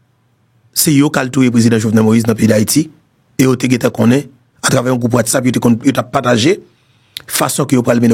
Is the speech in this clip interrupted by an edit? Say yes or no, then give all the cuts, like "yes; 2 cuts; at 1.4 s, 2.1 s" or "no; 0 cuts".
no; 0 cuts